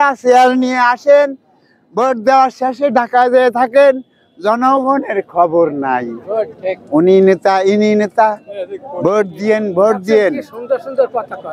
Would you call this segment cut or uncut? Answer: uncut